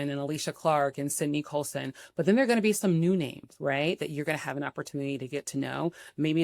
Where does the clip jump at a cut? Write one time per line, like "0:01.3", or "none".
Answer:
none

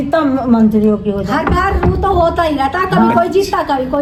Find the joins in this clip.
none

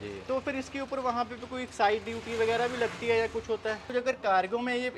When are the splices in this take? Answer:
0:03.8

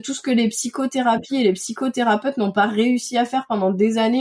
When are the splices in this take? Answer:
none

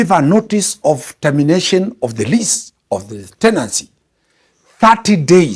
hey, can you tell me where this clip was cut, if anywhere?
none

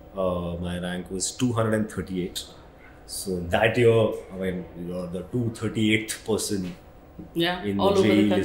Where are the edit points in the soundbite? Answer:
none

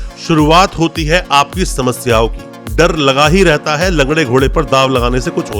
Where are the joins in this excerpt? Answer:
0:02.6

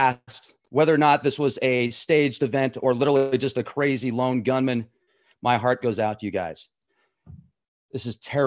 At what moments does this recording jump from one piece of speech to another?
0:03.2

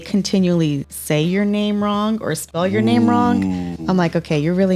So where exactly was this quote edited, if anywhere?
0:00.9

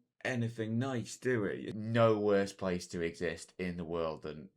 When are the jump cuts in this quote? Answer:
0:01.7

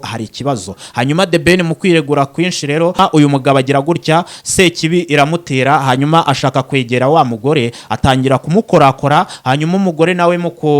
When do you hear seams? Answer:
0:03.0

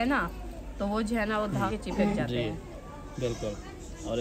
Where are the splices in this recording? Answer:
0:01.7

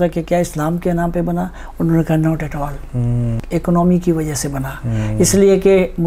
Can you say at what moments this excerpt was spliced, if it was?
0:03.4

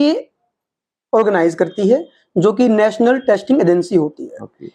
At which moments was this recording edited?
none

